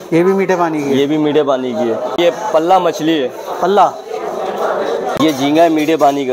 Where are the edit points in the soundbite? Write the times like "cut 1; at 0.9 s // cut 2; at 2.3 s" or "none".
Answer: cut 1; at 2.2 s // cut 2; at 5.1 s